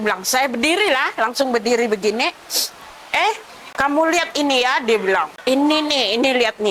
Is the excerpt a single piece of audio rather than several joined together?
no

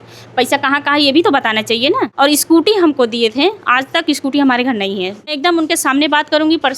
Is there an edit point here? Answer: yes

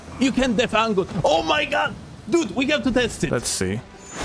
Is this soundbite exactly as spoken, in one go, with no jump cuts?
no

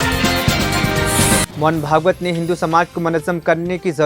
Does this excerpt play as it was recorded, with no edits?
no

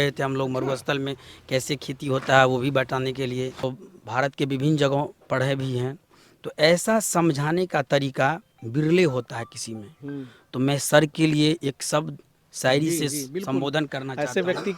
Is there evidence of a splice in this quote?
yes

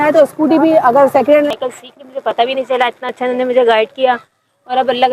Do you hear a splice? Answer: yes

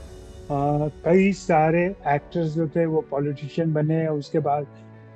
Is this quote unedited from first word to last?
yes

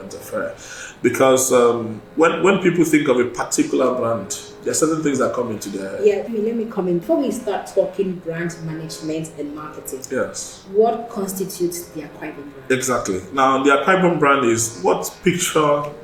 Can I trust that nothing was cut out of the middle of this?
yes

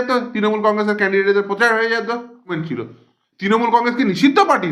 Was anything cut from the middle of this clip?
yes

